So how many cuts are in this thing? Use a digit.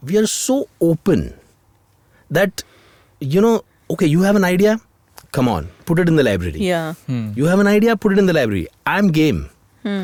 0